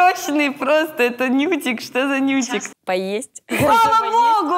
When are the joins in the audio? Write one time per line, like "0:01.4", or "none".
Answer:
0:02.7

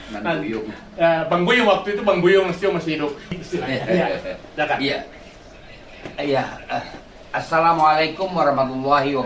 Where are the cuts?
0:03.3

